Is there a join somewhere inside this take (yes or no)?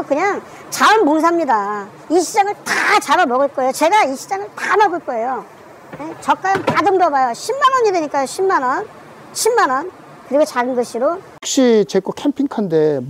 yes